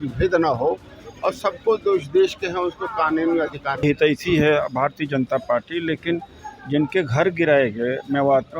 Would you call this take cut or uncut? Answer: cut